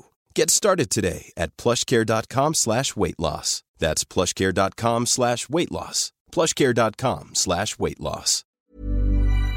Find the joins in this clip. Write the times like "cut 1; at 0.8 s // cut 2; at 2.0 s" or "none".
cut 1; at 8.5 s